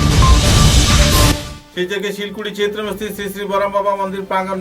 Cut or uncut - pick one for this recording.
cut